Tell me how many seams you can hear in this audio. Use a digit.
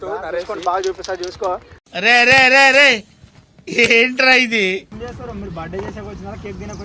1